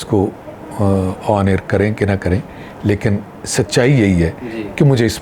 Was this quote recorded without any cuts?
yes; 0 cuts

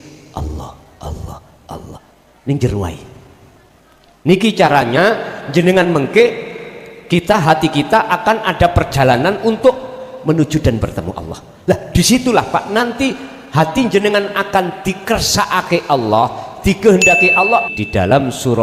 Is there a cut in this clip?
yes; 1 cut; at 17.7 s

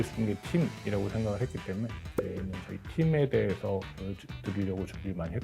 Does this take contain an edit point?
no; 0 cuts

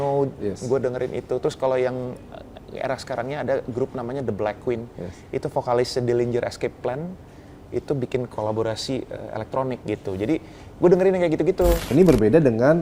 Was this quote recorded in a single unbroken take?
no; 2 cuts; at 9.8 s, 11.9 s

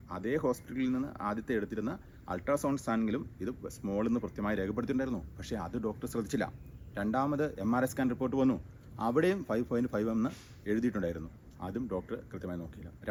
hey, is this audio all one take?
yes; 0 cuts

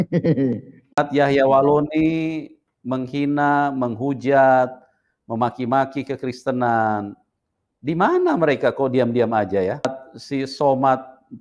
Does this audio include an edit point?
yes; 2 cuts; at 1.0 s, 10.1 s

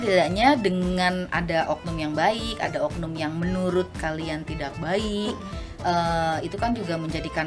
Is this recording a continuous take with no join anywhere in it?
yes; 0 cuts

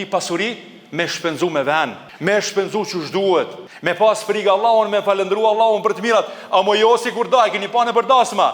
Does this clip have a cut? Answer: yes; 2 cuts; at 2.1 s, 3.7 s

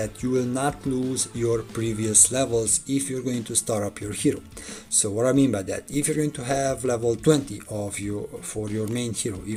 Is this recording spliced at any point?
no; 0 cuts

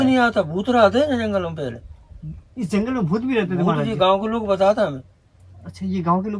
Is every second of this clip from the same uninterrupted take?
yes; 0 cuts

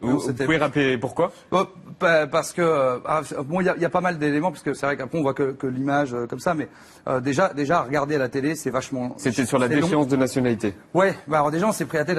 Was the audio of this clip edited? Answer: yes; 1 cut; at 5.6 s

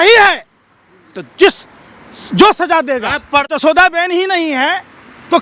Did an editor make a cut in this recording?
yes; 1 cut; at 3.6 s

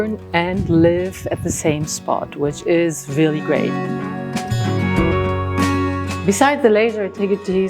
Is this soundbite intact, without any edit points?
no; 2 cuts; at 3.7 s, 6.2 s

